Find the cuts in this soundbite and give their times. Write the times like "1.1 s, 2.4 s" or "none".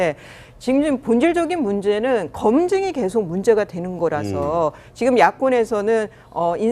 4.8 s